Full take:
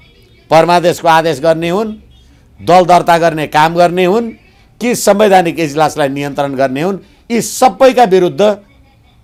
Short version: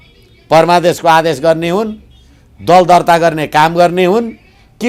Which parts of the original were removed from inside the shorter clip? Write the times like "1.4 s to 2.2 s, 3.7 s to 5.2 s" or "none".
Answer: none

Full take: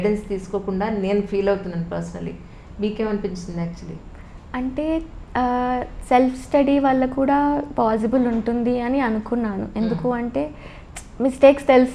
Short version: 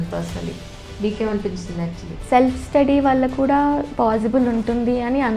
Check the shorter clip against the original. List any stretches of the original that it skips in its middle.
3.9 s to 5.9 s

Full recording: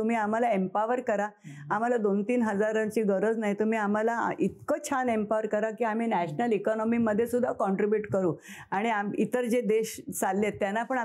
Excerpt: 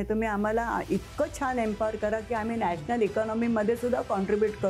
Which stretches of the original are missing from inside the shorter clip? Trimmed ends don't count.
none

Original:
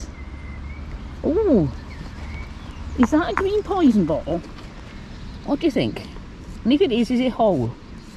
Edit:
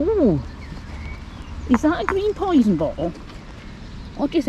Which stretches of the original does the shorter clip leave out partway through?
none

